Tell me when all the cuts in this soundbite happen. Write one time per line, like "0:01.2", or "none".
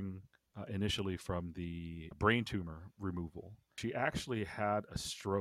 0:02.1
0:03.7